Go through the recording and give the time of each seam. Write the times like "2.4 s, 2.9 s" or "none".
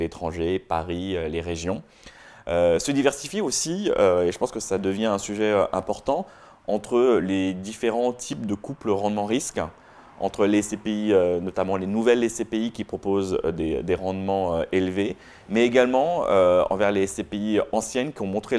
none

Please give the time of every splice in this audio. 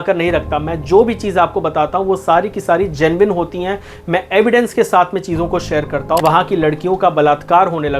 6.2 s

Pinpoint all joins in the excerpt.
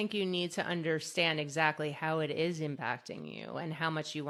none

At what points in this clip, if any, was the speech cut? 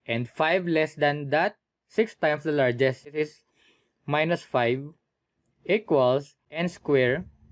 3.2 s, 6.4 s

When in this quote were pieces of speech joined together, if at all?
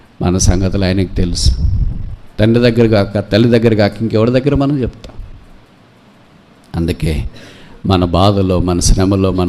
none

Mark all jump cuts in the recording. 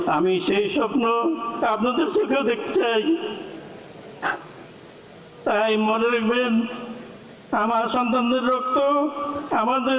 none

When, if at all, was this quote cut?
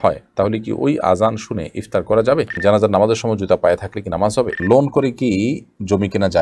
2.5 s, 4.6 s

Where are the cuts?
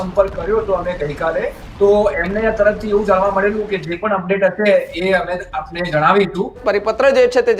1.6 s, 6.6 s

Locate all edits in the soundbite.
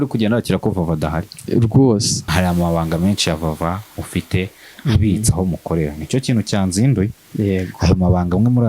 2.2 s

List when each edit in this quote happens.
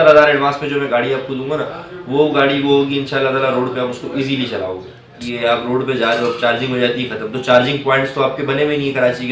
5.2 s

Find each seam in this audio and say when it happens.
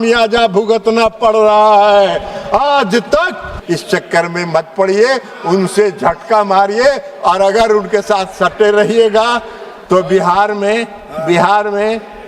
3.5 s

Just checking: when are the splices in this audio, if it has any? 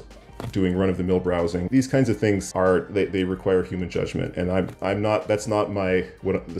1.7 s, 2.5 s

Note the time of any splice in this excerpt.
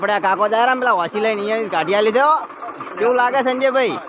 2.8 s

